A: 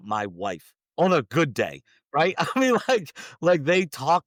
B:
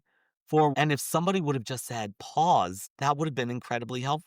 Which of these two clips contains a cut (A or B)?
B